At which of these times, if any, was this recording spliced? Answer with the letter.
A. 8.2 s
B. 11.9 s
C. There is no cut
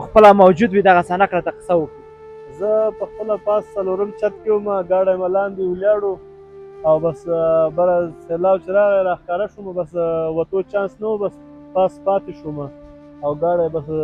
C